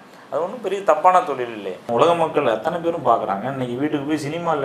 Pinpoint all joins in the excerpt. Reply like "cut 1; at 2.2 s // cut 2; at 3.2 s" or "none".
cut 1; at 1.9 s